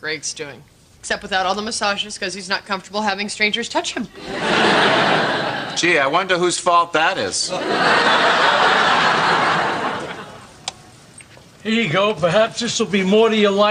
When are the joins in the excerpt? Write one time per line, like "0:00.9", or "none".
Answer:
none

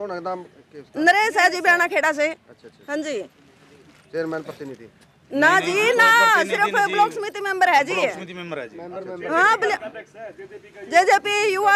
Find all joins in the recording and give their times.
none

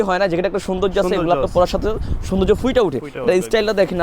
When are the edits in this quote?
none

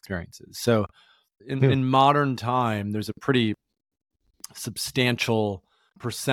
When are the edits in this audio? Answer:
0:01.4

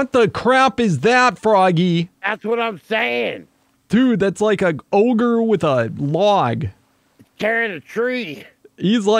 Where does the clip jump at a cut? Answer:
none

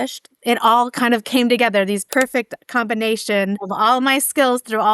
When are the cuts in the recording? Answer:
0:02.1
0:03.6

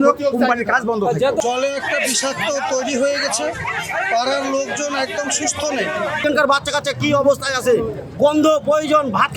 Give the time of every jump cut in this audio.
0:01.4
0:06.2

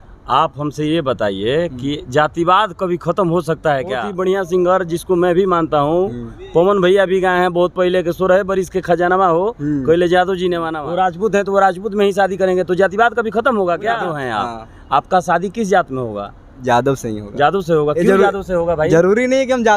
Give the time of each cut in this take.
0:04.1
0:10.7
0:14.1

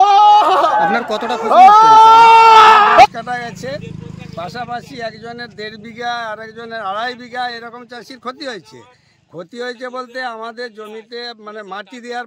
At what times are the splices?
0:03.1

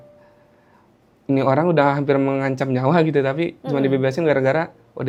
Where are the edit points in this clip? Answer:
none

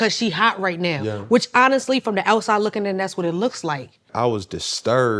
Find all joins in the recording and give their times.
0:04.1

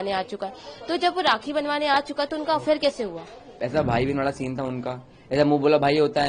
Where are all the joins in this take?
0:03.5

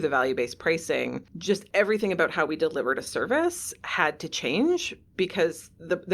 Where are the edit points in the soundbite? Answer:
0:01.5

